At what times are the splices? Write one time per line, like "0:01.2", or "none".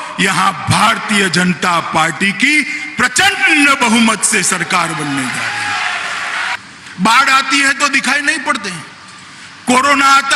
0:06.5